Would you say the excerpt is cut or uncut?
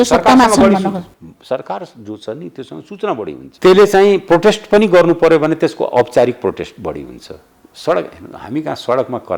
cut